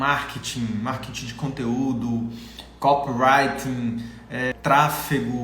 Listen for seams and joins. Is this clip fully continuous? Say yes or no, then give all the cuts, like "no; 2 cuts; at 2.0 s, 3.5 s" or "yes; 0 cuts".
no; 1 cut; at 4.5 s